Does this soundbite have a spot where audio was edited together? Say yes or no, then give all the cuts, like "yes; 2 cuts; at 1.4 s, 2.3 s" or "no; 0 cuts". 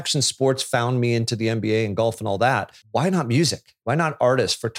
yes; 2 cuts; at 2.8 s, 3.7 s